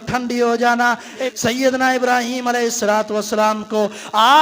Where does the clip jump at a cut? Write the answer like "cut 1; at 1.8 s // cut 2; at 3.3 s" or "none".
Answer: cut 1; at 1.2 s